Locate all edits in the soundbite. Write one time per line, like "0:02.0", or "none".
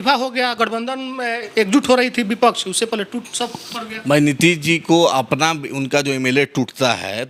none